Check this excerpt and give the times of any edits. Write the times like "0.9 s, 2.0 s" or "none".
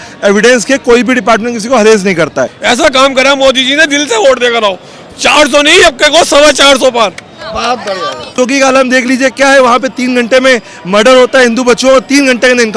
2.6 s, 8.4 s